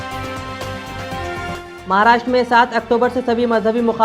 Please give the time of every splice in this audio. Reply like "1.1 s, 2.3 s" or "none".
1.5 s